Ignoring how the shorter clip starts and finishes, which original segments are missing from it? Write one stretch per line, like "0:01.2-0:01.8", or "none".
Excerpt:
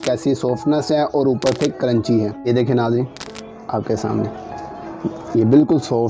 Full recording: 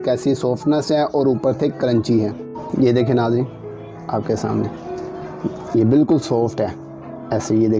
0:02.5-0:02.9